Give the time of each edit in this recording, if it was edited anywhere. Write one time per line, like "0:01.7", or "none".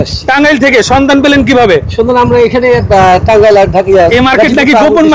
none